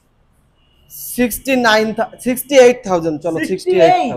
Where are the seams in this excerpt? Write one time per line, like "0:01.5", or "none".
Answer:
none